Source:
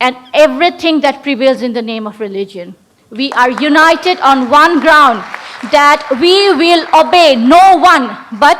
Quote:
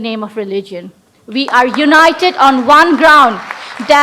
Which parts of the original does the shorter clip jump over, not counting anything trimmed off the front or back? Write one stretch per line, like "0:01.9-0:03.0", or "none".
none